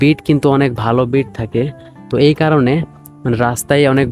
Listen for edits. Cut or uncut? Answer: uncut